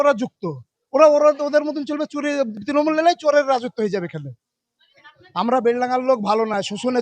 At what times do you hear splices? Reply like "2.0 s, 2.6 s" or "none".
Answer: 4.7 s